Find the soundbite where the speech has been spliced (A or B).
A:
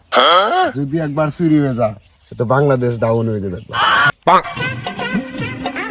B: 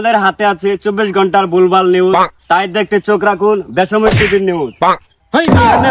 A